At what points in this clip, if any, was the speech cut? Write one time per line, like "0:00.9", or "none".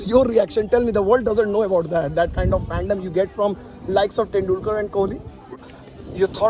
0:05.6